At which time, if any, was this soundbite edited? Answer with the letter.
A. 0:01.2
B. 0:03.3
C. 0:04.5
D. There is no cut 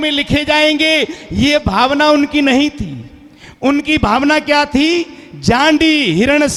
D